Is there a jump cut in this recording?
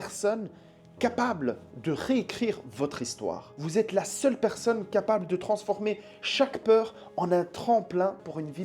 no; 0 cuts

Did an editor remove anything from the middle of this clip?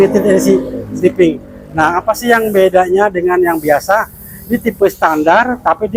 no; 0 cuts

